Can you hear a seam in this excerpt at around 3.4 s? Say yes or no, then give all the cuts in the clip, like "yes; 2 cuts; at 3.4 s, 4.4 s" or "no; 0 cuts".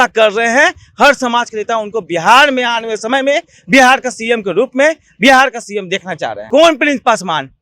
no; 1 cut; at 6.3 s